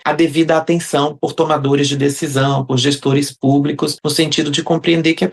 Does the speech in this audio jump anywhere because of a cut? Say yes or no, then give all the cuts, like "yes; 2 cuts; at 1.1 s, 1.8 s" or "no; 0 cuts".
no; 0 cuts